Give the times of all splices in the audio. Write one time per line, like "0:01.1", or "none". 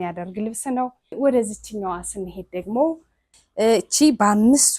0:01.2
0:03.2

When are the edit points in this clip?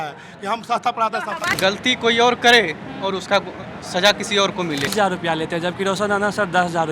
0:01.5
0:04.9

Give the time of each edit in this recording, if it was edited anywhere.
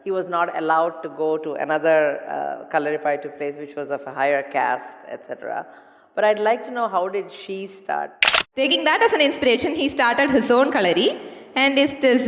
0:08.4

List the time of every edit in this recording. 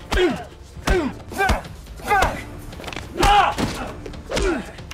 0:03.8

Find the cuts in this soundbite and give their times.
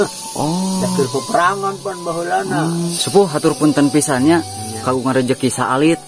0:02.9

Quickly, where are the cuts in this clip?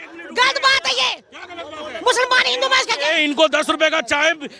none

